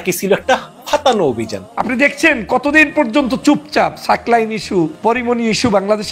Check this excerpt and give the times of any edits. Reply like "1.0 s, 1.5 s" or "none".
1.6 s, 4.9 s